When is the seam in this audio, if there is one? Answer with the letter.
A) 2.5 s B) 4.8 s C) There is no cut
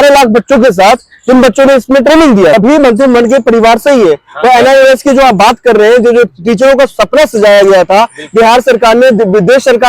A